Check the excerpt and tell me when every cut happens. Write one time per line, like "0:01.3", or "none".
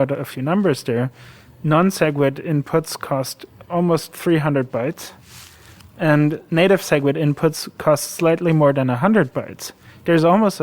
none